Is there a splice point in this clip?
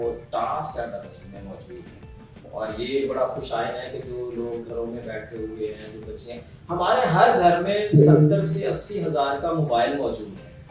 no; 0 cuts

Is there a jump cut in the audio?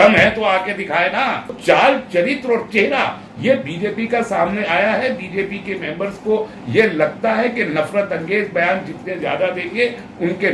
yes; 1 cut; at 1.6 s

